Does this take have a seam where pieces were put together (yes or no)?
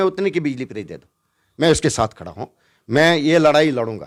no